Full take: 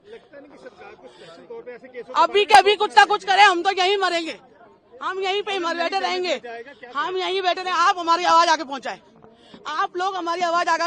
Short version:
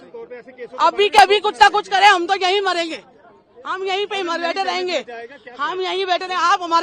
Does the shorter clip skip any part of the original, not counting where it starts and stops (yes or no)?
no